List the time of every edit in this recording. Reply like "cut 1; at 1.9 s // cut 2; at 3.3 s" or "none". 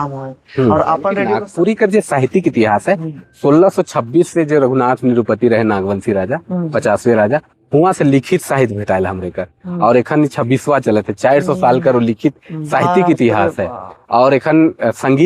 cut 1; at 1.3 s